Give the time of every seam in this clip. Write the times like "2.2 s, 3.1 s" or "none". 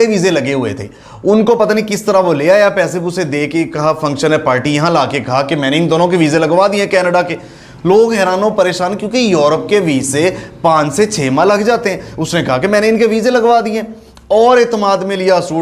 none